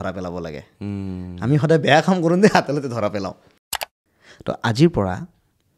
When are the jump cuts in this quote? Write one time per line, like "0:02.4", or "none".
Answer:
0:03.5